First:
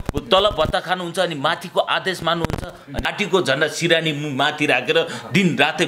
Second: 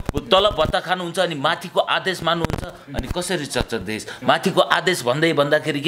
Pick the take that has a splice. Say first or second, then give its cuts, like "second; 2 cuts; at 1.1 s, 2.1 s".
first; 1 cut; at 3.1 s